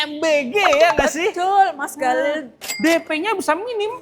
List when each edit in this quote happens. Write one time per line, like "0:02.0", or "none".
0:02.7

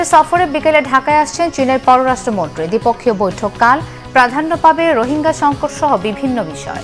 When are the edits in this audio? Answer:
none

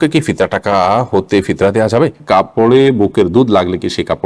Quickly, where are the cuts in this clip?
0:02.2

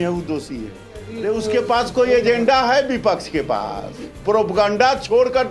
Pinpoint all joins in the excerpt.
0:01.0

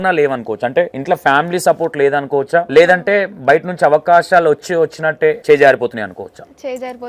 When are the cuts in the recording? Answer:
0:01.0
0:02.7
0:05.4

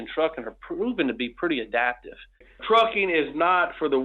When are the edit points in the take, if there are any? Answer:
0:02.5

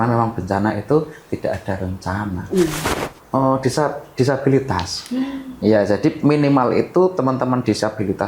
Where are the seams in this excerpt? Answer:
0:02.8

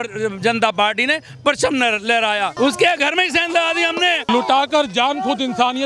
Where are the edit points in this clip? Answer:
0:02.5
0:04.3

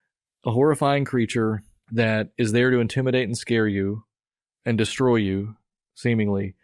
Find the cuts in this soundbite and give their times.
0:02.3

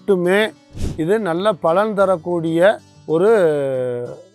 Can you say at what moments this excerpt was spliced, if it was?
none

